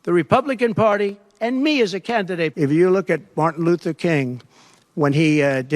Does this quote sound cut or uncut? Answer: cut